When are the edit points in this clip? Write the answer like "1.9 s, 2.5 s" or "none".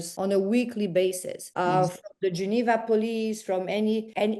none